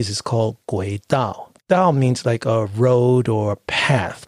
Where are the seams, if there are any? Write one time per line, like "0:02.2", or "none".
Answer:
0:01.5